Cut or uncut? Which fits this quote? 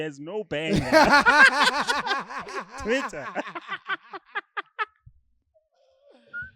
uncut